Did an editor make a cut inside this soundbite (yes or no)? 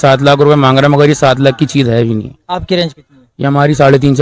no